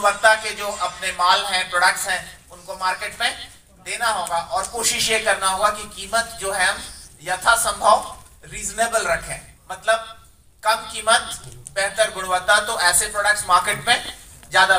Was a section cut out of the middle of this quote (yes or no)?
no